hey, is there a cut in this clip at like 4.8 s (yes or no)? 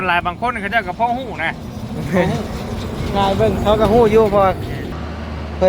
yes